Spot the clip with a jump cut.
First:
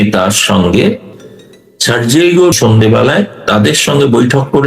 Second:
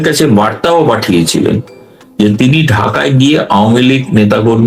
first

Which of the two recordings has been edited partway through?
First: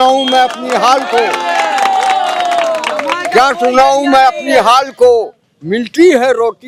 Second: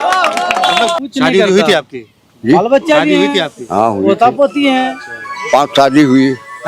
second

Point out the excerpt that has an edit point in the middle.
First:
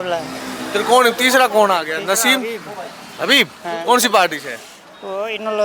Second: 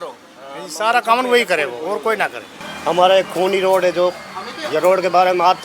second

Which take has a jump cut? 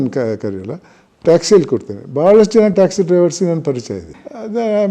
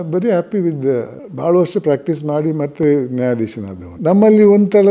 second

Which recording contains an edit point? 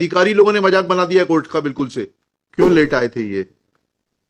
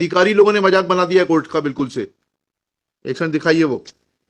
first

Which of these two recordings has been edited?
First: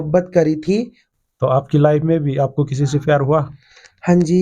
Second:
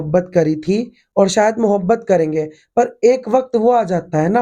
first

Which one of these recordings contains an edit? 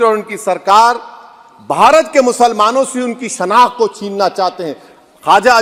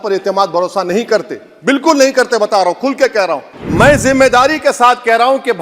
second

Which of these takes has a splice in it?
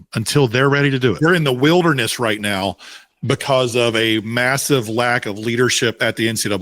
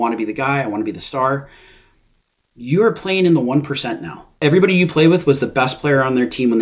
first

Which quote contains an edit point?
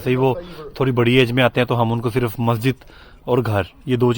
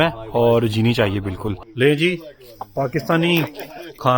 second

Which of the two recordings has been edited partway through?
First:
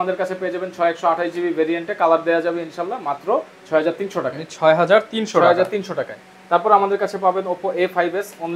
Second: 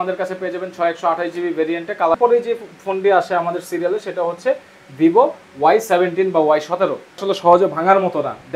second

